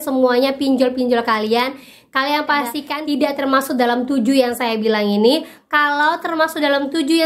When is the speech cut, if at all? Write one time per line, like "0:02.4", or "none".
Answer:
none